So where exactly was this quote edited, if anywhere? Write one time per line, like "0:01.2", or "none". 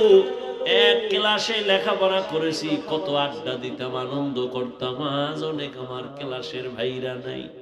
0:01.1